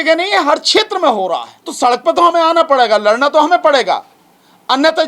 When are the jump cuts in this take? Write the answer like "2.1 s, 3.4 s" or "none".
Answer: 1.6 s